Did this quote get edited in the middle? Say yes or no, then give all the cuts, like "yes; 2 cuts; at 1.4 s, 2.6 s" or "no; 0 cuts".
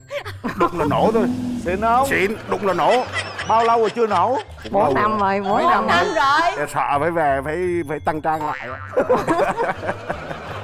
no; 0 cuts